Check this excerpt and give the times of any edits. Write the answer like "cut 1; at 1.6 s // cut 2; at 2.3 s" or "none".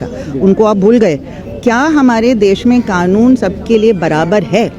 cut 1; at 1.4 s